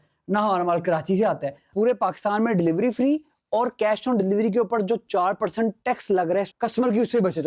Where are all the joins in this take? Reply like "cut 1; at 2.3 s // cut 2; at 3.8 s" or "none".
cut 1; at 1.6 s // cut 2; at 6.5 s

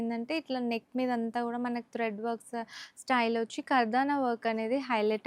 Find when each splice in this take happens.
none

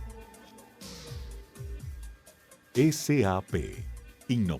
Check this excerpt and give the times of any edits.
cut 1; at 1.8 s

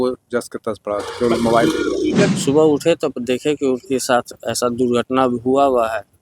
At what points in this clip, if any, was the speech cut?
cut 1; at 2.4 s

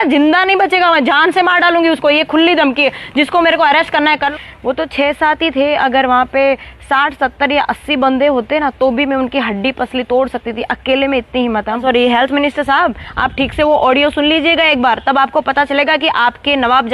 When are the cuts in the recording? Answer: cut 1; at 4.3 s // cut 2; at 11.8 s

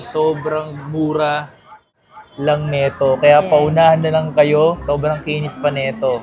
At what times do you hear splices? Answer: none

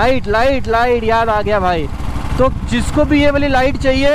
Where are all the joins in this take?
none

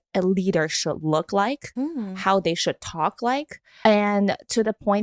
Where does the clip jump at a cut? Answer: cut 1; at 3.7 s

